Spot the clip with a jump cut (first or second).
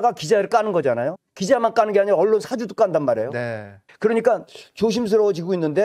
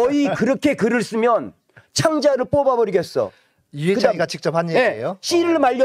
first